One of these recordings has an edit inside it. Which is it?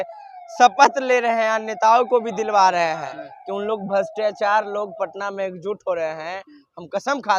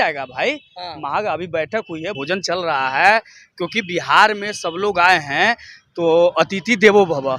second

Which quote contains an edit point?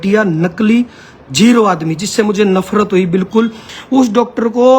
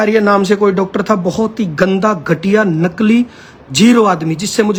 first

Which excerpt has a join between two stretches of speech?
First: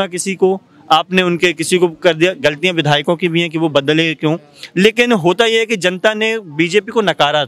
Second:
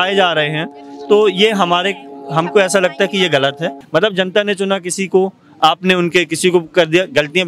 second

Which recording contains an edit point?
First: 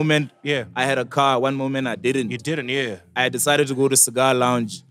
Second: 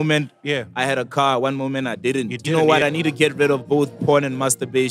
second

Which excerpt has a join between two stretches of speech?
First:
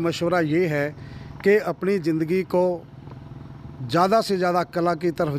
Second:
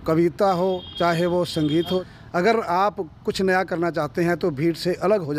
second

